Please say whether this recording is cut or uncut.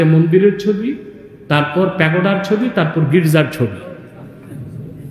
uncut